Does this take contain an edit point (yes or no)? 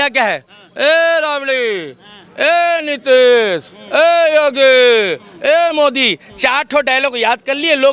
no